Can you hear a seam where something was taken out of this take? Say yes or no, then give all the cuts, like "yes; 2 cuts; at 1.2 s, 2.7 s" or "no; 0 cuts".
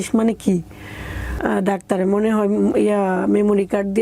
yes; 1 cut; at 1.3 s